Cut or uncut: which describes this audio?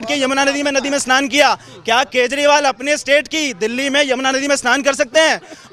uncut